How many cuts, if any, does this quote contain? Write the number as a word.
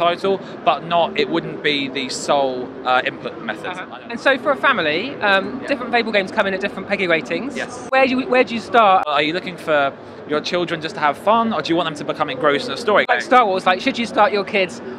four